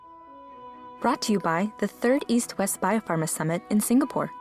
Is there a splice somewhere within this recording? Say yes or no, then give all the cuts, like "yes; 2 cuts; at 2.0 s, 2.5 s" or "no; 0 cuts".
yes; 1 cut; at 1.0 s